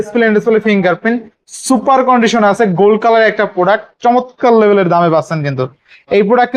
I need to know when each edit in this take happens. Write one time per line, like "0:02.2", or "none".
none